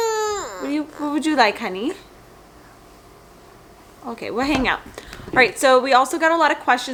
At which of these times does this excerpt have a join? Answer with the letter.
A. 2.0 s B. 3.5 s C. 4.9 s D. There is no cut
D